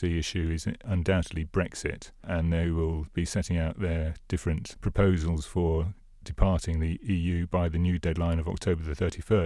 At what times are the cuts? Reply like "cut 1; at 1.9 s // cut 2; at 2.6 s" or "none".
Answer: cut 1; at 0.9 s // cut 2; at 2.3 s // cut 3; at 4.7 s // cut 4; at 7.0 s